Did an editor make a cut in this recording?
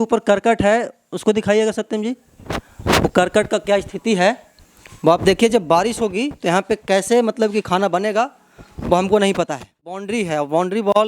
yes; 1 cut; at 10.0 s

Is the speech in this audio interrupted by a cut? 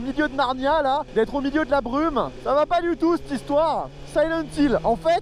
yes; 2 cuts; at 1.1 s, 2.4 s

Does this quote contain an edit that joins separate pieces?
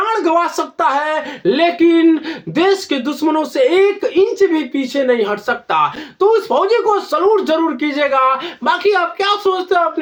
no; 0 cuts

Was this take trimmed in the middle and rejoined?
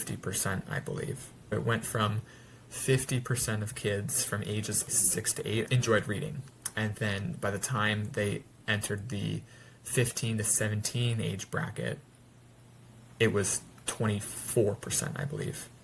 yes; 2 cuts; at 1.5 s, 5.0 s

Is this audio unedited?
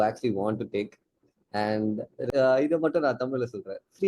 no; 1 cut; at 2.3 s

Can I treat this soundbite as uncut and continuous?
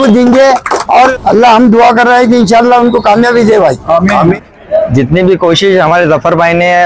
no; 2 cuts; at 1.1 s, 4.4 s

